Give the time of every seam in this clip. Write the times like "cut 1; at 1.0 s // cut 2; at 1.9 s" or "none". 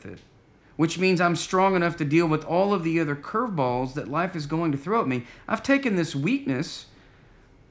none